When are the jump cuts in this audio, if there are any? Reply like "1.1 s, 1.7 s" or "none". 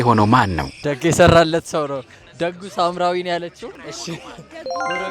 0.9 s, 3.8 s